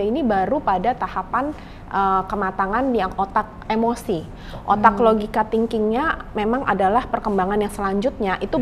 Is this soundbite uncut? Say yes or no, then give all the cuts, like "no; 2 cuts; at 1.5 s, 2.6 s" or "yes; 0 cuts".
yes; 0 cuts